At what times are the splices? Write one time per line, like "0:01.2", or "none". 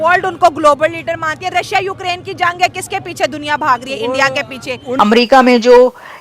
0:04.9